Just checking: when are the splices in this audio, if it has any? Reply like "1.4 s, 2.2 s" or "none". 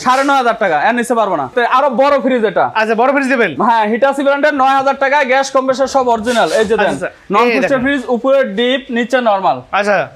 none